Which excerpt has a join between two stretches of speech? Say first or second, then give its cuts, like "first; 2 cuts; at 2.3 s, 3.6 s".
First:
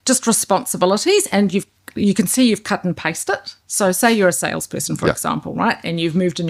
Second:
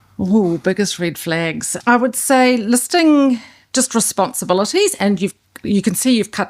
second; 1 cut; at 1.7 s